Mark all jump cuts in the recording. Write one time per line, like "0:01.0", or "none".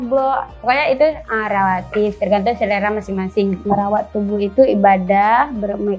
0:03.6

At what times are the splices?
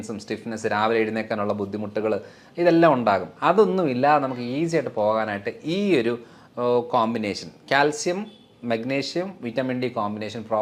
none

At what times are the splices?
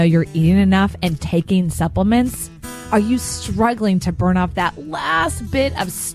none

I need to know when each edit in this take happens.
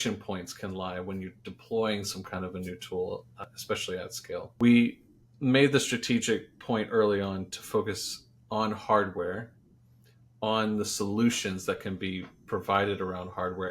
0:03.4
0:04.5

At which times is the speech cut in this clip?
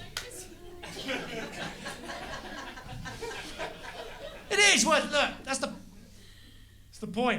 0:04.2

